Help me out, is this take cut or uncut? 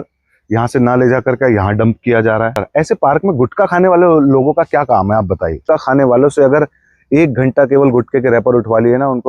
cut